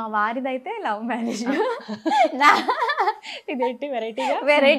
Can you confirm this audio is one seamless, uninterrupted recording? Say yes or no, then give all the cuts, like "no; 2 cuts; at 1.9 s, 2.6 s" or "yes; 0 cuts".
yes; 0 cuts